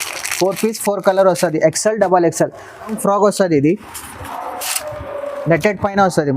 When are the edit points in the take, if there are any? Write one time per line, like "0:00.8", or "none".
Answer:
0:03.0